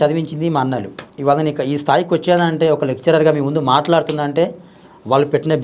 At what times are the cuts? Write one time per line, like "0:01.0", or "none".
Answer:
0:01.0